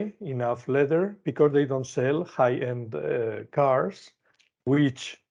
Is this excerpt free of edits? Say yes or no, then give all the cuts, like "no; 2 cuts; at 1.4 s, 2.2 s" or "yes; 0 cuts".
yes; 0 cuts